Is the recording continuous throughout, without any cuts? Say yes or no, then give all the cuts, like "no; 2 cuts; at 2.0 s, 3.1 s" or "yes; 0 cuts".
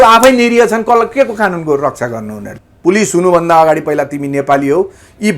no; 1 cut; at 2.4 s